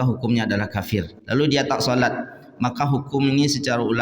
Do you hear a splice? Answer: yes; 1 cut; at 1.2 s

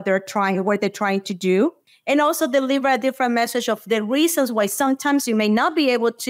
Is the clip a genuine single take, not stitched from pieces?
no; 1 cut; at 1.9 s

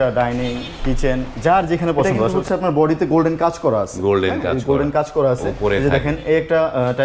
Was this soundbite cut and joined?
yes; 2 cuts; at 2.2 s, 5.5 s

